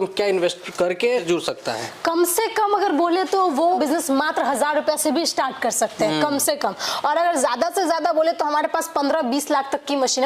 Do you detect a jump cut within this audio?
yes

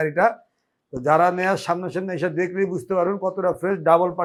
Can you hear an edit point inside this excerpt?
no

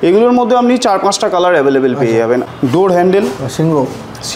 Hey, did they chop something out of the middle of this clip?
yes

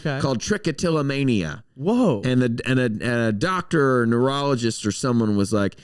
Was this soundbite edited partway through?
no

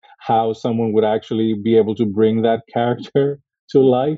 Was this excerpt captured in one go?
yes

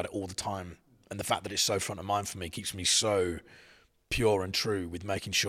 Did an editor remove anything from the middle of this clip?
no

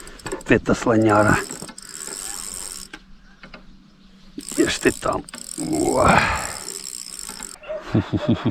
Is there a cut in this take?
yes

